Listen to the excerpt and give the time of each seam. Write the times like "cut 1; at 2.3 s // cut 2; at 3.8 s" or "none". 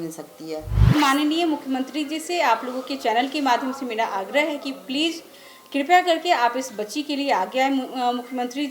cut 1; at 0.9 s